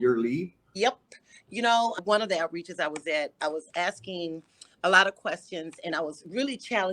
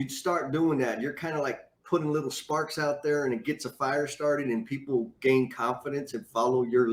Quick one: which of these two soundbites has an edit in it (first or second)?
first